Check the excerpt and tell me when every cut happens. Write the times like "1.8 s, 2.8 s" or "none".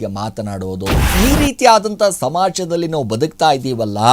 1.1 s